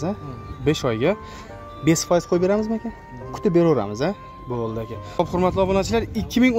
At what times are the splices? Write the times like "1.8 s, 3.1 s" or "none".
5.0 s